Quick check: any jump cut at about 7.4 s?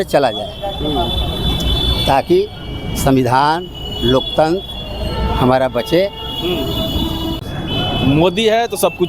yes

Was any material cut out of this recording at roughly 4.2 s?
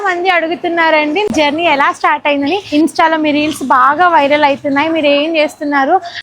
no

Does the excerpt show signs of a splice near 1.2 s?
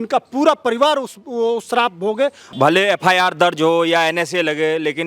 no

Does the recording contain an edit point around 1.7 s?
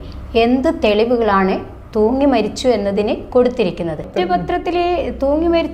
no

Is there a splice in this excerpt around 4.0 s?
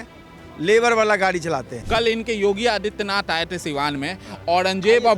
no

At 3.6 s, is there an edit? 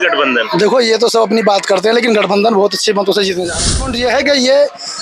yes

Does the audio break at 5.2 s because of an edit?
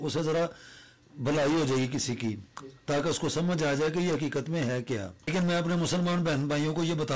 yes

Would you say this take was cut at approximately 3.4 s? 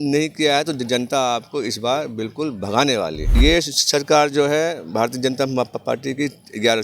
yes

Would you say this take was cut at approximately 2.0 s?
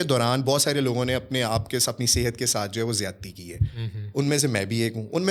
no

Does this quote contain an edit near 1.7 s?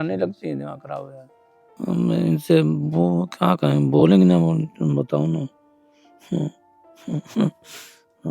yes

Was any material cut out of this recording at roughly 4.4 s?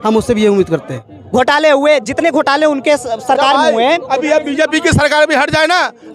no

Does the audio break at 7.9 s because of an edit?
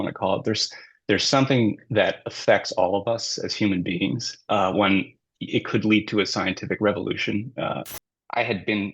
yes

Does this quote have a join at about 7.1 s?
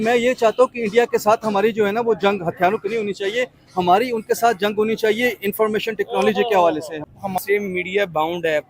yes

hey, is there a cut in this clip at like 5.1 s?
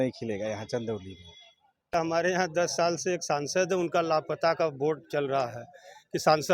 no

